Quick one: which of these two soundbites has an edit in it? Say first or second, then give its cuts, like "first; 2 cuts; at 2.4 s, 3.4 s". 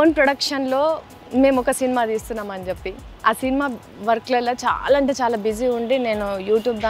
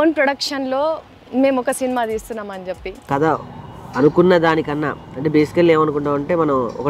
second; 1 cut; at 3.1 s